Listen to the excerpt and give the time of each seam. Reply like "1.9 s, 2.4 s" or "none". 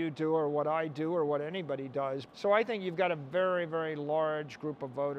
2.3 s